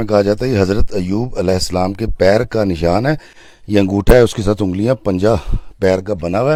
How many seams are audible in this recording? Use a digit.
0